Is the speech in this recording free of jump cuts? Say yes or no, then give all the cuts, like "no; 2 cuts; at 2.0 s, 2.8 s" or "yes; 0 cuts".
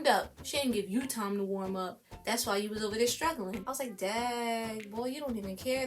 no; 1 cut; at 3.5 s